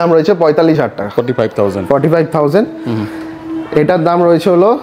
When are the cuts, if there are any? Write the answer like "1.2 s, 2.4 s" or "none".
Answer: none

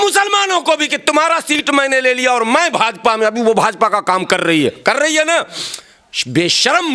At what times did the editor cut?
none

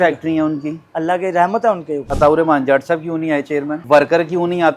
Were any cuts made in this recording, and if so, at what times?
2.1 s, 3.8 s

